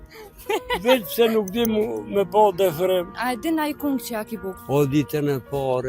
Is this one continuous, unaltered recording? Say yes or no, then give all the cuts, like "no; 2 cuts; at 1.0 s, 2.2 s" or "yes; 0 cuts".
no; 2 cuts; at 3.2 s, 4.5 s